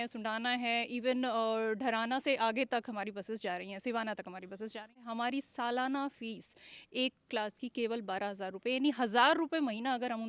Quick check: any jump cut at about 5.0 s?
yes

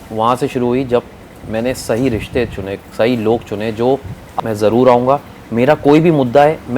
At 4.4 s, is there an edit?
yes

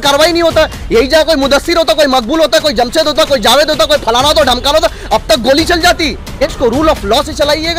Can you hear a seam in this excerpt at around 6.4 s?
yes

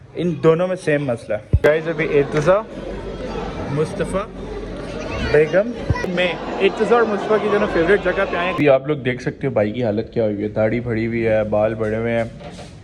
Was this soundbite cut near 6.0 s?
no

